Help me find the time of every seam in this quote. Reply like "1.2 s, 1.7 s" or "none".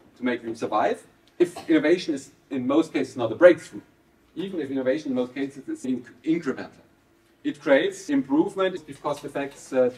1.3 s, 5.9 s, 8.0 s, 8.9 s